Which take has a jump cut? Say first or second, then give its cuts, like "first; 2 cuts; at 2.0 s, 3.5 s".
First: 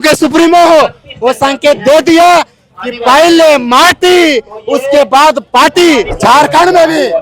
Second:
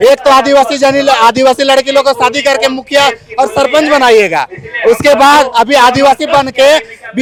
first; 1 cut; at 6.1 s